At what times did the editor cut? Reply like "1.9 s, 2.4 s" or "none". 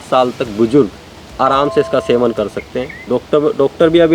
none